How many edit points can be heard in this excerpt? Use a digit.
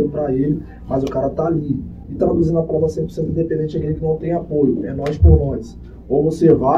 1